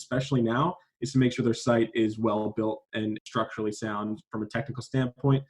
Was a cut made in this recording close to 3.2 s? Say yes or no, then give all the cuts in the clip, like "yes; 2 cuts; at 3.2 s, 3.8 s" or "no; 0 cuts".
yes; 1 cut; at 3.2 s